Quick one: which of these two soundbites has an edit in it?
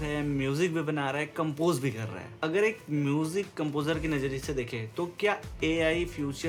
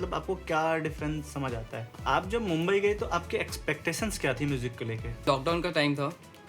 second; 2 cuts; at 1.9 s, 5.3 s

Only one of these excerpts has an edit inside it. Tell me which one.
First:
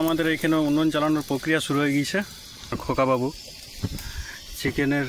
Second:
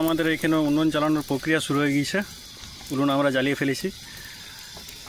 first; 1 cut; at 2.8 s

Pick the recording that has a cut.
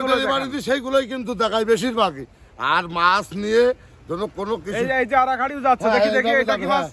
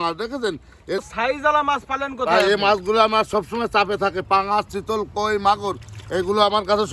second; 1 cut; at 1.0 s

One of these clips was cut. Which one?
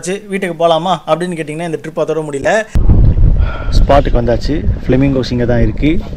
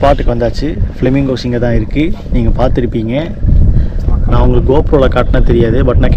first; 1 cut; at 2.7 s

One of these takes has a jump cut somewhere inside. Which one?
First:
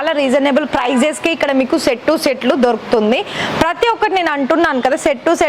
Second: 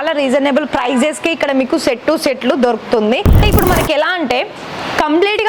second; 1 cut; at 3.3 s

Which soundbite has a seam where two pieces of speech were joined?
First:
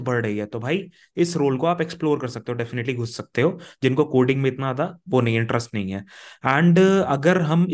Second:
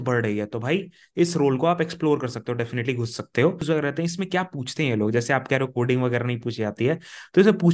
second; 1 cut; at 3.6 s

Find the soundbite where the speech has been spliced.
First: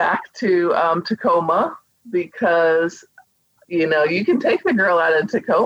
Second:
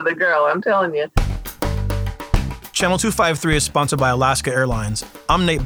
second; 1 cut; at 1.4 s

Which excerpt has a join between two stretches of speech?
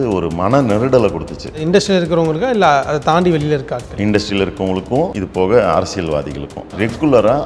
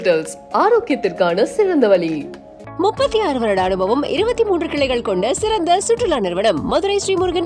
first; 3 cuts; at 1.6 s, 5.2 s, 6.7 s

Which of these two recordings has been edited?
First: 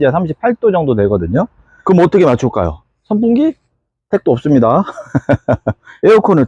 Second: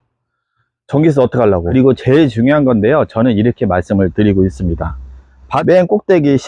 second; 2 cuts; at 1.7 s, 5.5 s

